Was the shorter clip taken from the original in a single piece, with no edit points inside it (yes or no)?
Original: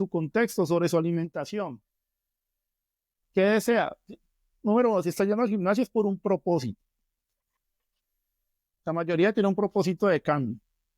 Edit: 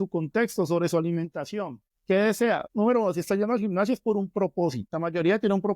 no